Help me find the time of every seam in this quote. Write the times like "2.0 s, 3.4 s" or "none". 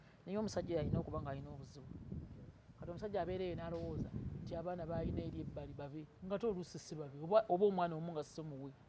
none